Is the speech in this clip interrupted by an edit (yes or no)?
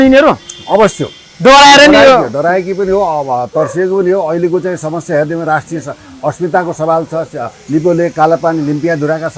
no